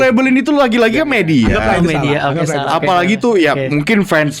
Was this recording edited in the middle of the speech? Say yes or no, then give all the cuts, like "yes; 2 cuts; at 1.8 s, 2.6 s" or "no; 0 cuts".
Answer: no; 0 cuts